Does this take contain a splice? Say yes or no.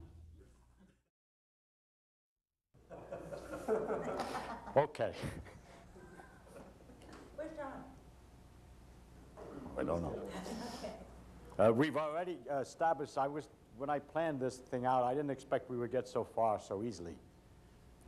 no